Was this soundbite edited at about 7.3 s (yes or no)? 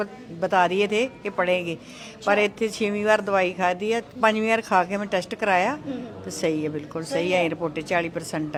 no